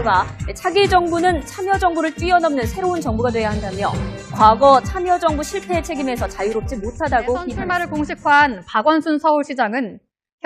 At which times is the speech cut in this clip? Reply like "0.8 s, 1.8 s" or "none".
none